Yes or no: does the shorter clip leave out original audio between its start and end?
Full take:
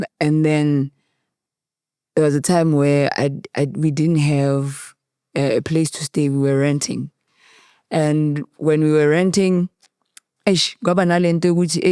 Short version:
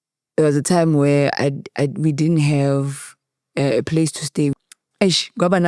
yes